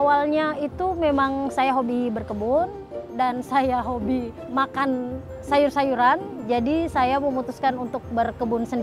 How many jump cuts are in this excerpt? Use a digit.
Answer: 1